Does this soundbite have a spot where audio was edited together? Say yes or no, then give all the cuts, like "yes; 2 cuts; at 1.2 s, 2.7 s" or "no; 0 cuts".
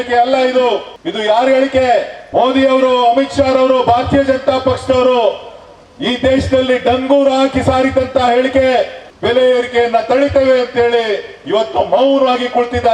yes; 3 cuts; at 1.0 s, 2.2 s, 9.0 s